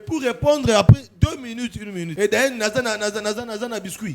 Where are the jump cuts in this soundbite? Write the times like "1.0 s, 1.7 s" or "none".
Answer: 2.1 s